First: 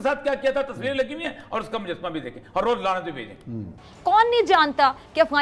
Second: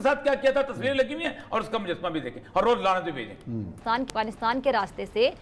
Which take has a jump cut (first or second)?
second